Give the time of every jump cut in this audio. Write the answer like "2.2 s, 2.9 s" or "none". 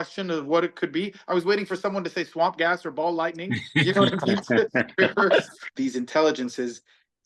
5.7 s

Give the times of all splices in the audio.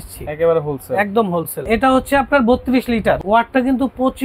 1.6 s, 3.2 s

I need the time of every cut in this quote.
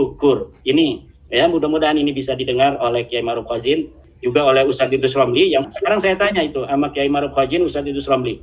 4.0 s, 5.7 s

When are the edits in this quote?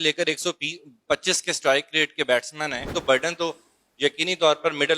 2.9 s

